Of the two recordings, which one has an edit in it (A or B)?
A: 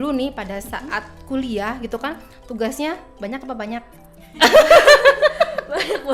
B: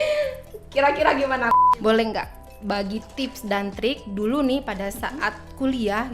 B